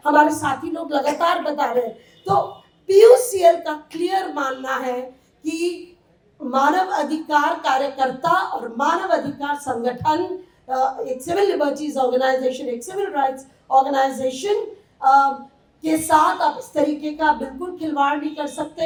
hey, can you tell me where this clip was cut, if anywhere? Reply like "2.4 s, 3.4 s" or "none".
none